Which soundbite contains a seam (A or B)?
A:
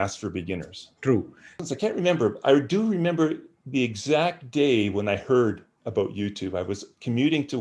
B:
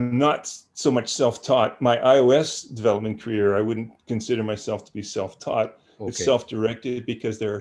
A